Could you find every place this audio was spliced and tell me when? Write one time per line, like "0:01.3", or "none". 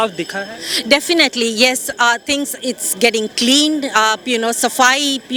none